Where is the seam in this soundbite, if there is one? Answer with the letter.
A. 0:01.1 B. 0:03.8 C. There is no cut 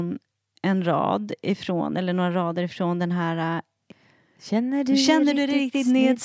B